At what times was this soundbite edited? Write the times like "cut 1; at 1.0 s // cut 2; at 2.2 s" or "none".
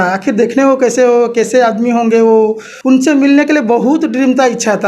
cut 1; at 2.7 s